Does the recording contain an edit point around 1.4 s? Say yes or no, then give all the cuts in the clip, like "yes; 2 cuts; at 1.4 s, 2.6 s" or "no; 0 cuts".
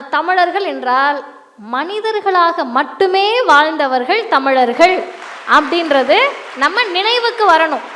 no; 1 cut; at 6.4 s